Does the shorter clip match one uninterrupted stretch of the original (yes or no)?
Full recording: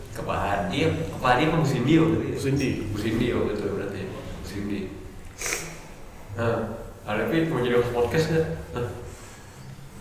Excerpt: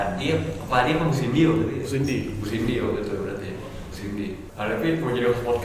no